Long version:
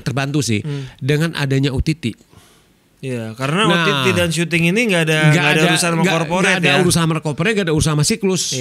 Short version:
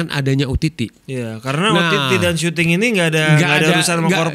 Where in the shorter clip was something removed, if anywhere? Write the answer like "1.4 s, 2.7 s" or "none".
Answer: 1.0 s